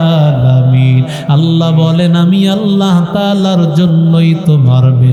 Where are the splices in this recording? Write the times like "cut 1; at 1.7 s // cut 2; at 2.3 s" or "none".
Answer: none